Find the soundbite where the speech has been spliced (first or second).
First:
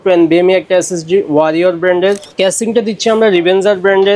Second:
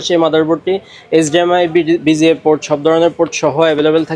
first